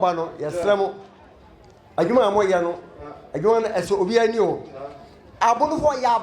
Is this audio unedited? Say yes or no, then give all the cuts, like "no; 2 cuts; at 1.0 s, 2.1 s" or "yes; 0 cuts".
yes; 0 cuts